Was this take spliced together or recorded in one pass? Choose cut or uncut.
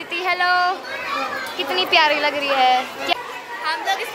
cut